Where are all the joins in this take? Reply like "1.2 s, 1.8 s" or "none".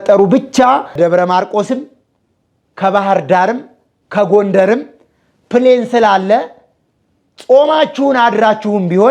1.0 s